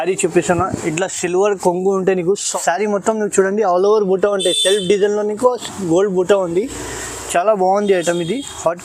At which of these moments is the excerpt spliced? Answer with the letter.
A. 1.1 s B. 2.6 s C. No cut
B